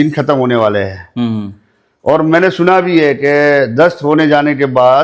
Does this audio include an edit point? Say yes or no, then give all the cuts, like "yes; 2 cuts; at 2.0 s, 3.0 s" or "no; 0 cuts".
no; 0 cuts